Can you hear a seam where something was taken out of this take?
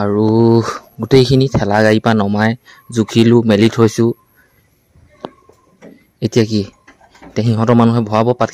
no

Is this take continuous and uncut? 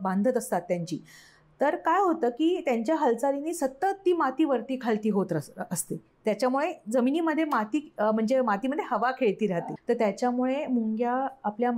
no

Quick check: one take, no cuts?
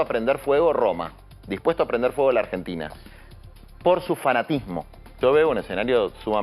no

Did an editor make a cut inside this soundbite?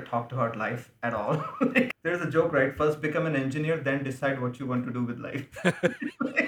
yes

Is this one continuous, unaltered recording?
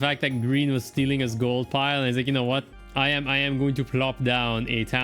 no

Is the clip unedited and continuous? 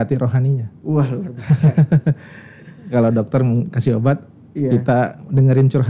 yes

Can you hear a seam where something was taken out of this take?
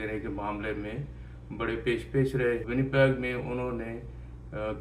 yes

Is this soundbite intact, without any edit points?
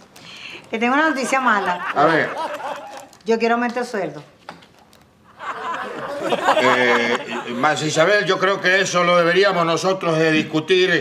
no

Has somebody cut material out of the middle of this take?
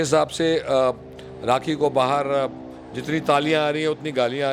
no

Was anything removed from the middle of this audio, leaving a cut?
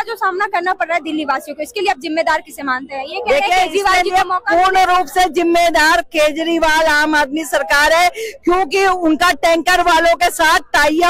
no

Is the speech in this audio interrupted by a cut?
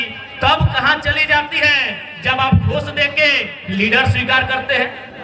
no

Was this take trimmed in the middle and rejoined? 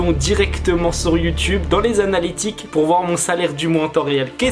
no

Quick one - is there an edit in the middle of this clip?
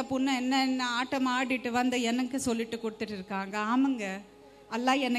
no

